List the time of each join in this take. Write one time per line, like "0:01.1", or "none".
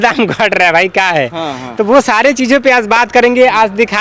none